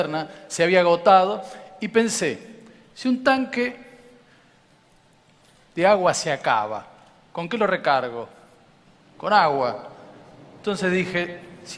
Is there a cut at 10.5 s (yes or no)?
no